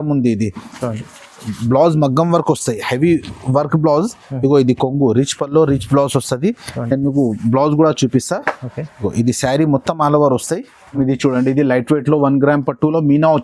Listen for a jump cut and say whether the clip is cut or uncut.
cut